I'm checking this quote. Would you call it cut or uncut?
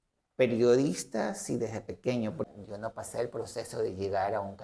cut